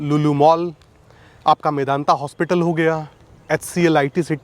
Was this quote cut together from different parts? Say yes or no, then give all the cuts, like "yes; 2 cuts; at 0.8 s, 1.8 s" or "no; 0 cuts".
no; 0 cuts